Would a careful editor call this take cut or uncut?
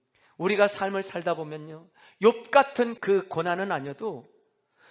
cut